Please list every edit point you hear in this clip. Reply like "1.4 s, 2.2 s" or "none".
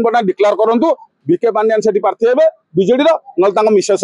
1.1 s

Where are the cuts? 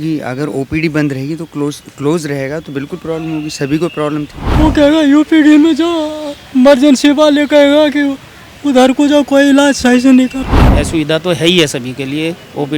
4.4 s, 10.6 s

